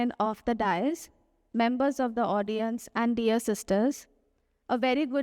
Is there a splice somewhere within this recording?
no; 0 cuts

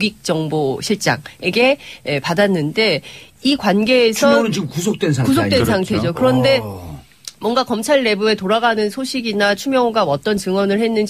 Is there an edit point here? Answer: yes; 1 cut; at 1.5 s

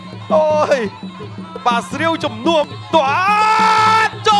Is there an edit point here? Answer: yes; 1 cut; at 2.6 s

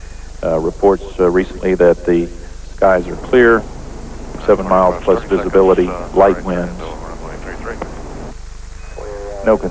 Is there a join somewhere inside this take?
yes; 1 cut; at 7.8 s

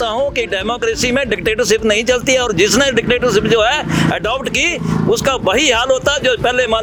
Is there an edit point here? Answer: no; 0 cuts

